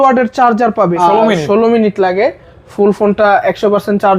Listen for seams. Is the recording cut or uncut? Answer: cut